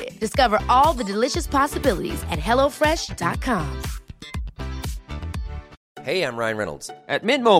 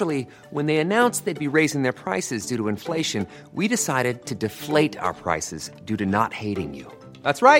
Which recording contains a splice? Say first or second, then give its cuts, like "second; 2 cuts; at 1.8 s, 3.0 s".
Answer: first; 1 cut; at 5.7 s